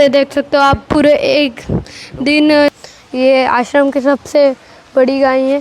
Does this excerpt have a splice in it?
yes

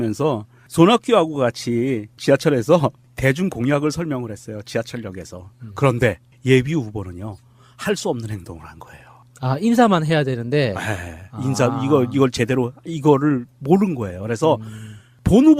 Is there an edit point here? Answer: yes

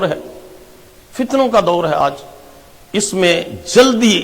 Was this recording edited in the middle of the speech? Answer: yes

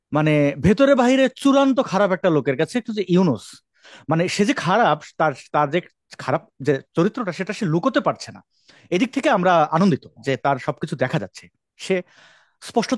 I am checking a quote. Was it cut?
no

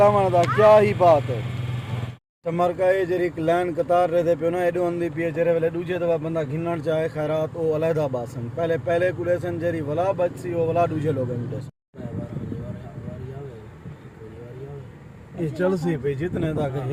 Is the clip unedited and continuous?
yes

